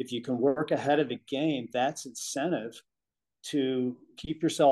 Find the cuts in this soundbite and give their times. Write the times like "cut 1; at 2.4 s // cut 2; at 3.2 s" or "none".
none